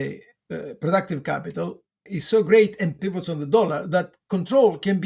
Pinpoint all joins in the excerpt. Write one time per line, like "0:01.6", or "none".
0:02.1
0:03.0

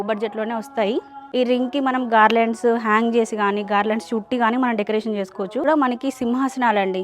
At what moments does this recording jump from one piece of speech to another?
0:01.1
0:05.7

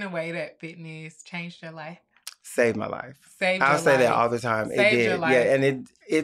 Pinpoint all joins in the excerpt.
none

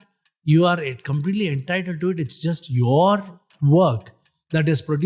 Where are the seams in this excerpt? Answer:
none

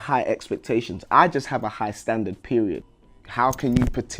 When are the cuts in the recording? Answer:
0:02.8

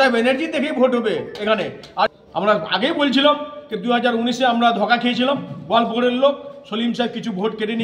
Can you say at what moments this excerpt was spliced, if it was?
0:02.1

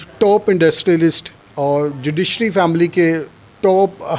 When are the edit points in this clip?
none

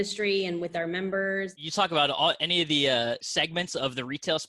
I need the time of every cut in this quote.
0:01.6
0:03.3

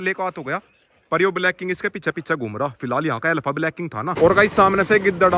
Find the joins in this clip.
0:04.1

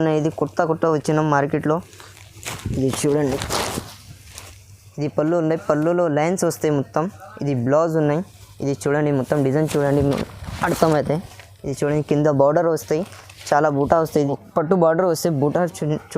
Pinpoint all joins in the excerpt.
0:14.3

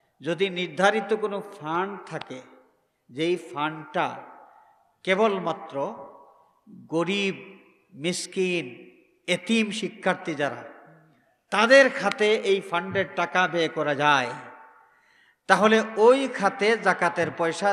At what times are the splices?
none

